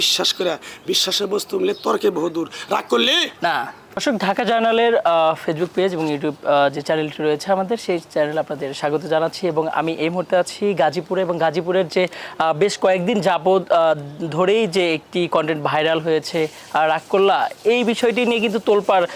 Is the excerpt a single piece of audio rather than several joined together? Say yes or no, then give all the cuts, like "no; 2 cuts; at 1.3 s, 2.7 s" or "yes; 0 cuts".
yes; 0 cuts